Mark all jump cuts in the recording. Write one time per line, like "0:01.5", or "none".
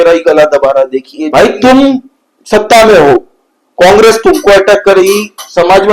0:01.2